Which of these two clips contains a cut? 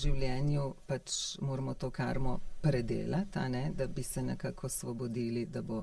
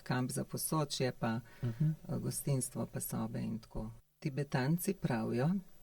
second; 1 cut; at 4.0 s

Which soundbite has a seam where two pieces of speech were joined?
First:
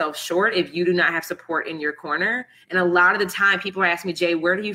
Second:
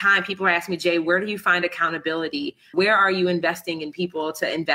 second; 1 cut; at 2.7 s

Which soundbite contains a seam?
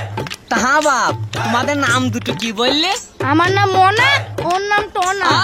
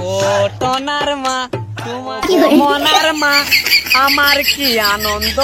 second; 1 cut; at 2.1 s

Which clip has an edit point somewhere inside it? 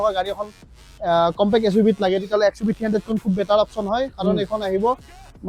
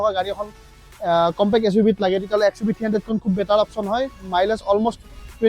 second; 1 cut; at 4.1 s

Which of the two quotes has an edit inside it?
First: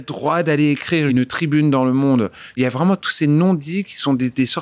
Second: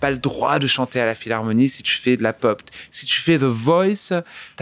first; 2 cuts; at 1.1 s, 2.5 s

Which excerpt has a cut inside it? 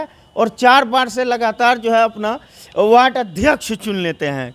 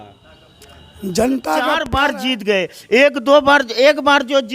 second; 1 cut; at 1.8 s

